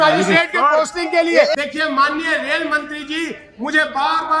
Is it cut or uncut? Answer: cut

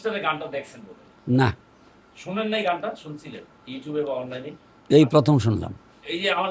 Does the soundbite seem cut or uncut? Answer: uncut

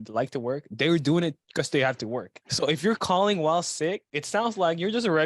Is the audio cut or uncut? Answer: cut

